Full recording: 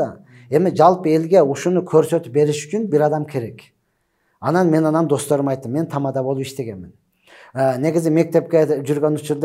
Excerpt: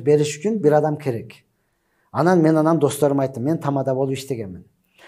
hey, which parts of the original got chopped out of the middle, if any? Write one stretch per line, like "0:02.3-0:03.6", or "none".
none